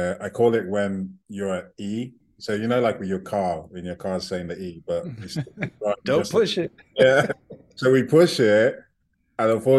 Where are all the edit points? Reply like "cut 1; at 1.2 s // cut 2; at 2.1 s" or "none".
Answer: cut 1; at 2.3 s